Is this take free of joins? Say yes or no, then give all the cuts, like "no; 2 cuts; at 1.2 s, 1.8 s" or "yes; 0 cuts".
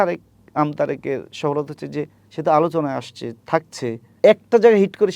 no; 1 cut; at 4.0 s